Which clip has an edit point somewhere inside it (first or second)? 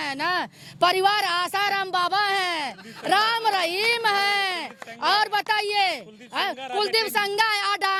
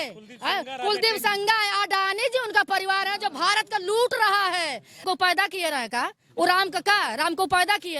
second